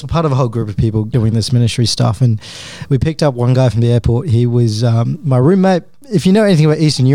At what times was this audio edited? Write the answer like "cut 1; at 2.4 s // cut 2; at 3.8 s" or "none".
cut 1; at 1.1 s